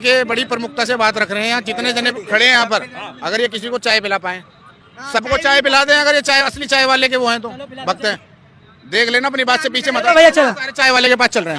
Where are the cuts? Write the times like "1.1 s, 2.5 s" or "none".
none